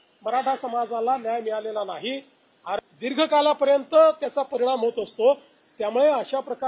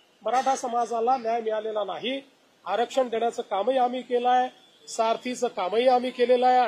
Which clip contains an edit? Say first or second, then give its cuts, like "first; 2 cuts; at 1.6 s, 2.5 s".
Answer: first; 1 cut; at 2.8 s